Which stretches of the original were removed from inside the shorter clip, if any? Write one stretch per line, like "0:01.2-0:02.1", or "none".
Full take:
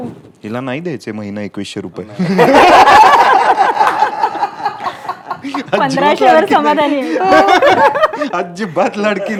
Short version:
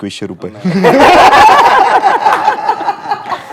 none